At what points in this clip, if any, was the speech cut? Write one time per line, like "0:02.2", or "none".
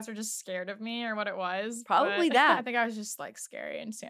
0:02.6